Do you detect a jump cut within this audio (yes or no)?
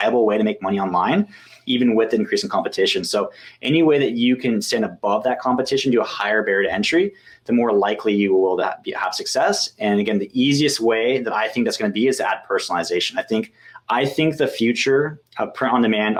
no